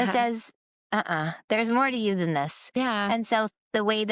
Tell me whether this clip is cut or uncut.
uncut